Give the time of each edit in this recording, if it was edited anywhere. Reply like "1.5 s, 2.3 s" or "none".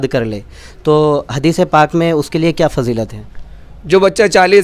none